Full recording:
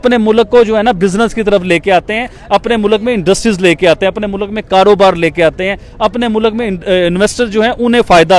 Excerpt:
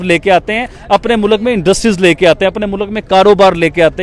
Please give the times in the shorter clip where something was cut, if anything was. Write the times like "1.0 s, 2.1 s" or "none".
none